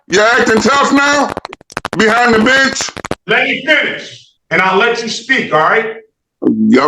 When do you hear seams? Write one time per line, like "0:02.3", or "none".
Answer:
0:03.1